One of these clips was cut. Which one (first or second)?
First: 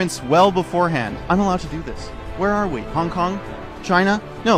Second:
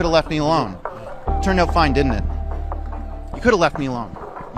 first